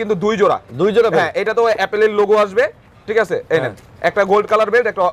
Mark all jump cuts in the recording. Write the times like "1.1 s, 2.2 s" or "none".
none